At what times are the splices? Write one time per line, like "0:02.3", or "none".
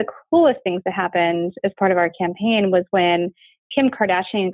none